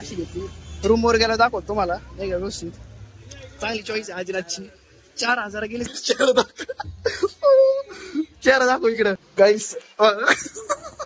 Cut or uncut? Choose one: cut